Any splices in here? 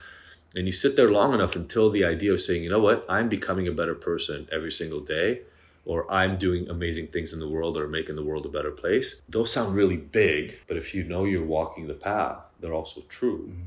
yes; 2 cuts; at 9.2 s, 10.6 s

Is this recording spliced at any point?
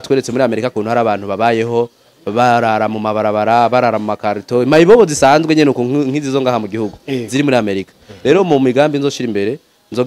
no; 0 cuts

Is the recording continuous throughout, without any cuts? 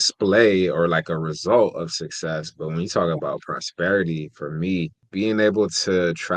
no; 1 cut; at 5.0 s

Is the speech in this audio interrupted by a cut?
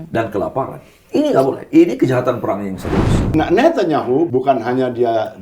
yes; 2 cuts; at 3.2 s, 4.3 s

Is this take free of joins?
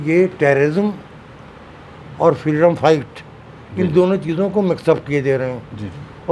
yes; 0 cuts

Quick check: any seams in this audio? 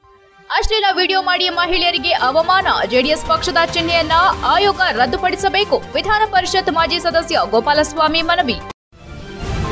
yes; 1 cut; at 8.7 s

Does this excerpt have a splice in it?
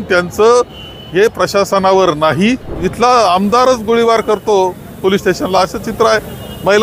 yes; 1 cut; at 2.8 s

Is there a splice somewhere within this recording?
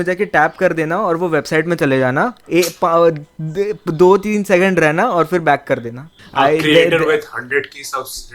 yes; 1 cut; at 6.2 s

